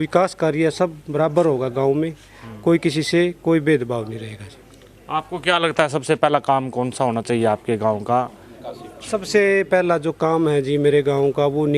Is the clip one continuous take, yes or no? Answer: yes